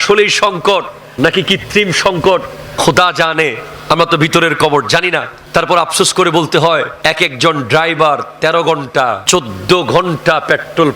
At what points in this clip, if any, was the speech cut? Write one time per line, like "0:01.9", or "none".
0:01.0
0:02.6
0:03.7
0:05.3
0:06.9
0:09.2